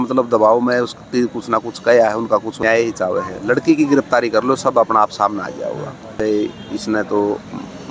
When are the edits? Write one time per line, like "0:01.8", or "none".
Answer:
0:02.6
0:06.2